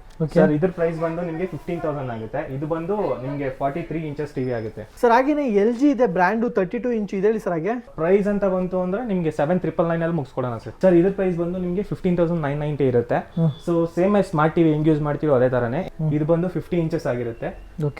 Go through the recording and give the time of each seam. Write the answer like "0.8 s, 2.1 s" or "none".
4.9 s, 7.9 s, 10.6 s, 15.8 s